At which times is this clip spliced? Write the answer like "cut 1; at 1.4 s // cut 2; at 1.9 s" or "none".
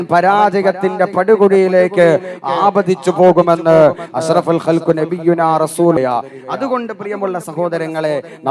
cut 1; at 6.0 s